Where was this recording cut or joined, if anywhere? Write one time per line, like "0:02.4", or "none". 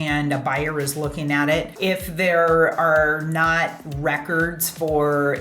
0:01.7